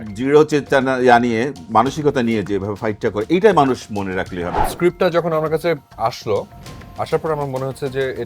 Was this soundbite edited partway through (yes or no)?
yes